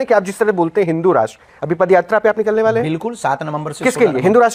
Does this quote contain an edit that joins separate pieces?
no; 0 cuts

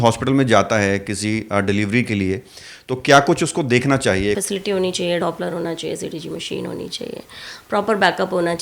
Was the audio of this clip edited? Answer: yes; 1 cut; at 4.4 s

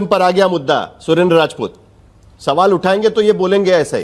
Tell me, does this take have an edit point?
no; 0 cuts

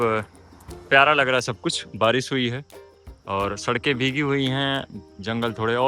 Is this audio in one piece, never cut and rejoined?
yes; 0 cuts

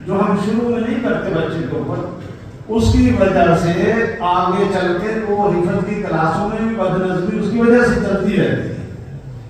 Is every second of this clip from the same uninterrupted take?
yes; 0 cuts

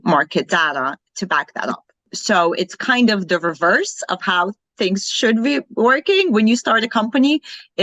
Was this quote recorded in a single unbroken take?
no; 1 cut; at 2.1 s

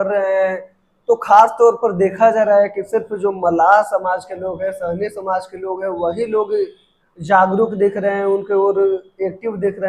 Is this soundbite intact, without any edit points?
yes; 0 cuts

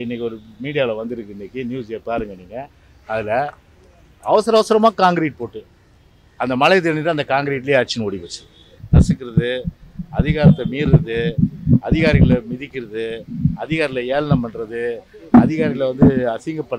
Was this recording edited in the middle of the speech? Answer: yes; 1 cut; at 8.7 s

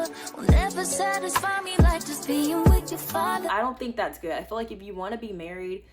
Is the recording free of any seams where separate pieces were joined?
no; 1 cut; at 3.4 s

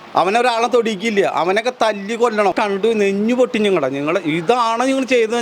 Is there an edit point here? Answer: yes; 1 cut; at 2.5 s

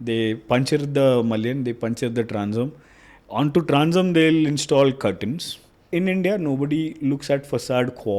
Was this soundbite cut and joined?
yes; 1 cut; at 5.9 s

